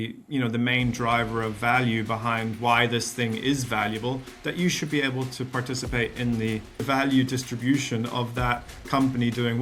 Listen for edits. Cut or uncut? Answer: cut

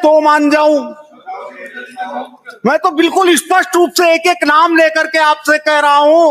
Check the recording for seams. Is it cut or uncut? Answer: uncut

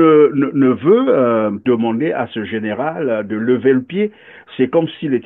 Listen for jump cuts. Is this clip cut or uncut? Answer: cut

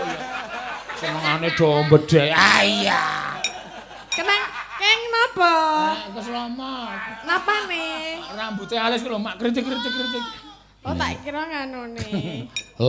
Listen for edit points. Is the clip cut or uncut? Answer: uncut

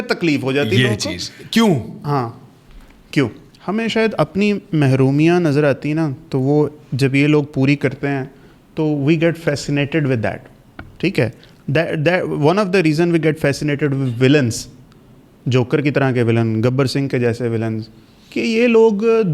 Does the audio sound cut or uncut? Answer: cut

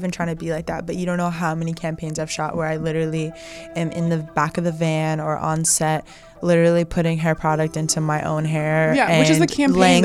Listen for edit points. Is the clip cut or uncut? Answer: uncut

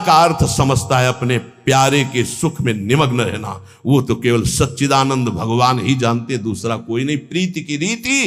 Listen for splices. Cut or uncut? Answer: uncut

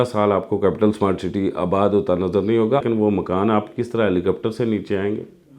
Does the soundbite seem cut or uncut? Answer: cut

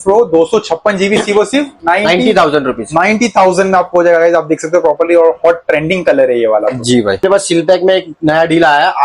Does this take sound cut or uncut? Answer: cut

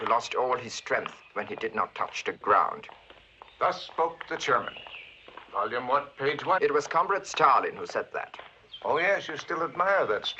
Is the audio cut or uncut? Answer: uncut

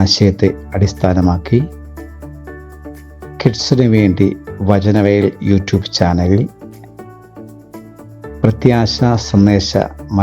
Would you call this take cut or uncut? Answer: cut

